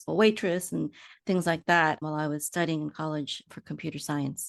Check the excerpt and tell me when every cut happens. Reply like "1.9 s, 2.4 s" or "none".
none